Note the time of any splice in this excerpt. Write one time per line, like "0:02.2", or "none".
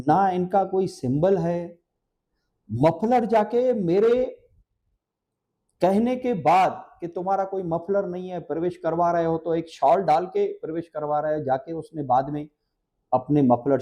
none